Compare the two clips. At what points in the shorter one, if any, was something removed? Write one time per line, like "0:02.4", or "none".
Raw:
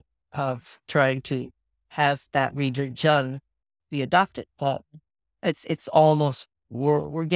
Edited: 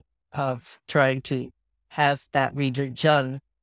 none